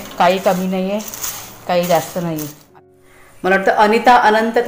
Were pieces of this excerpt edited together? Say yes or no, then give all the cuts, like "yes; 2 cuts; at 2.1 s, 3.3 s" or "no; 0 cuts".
yes; 1 cut; at 2.6 s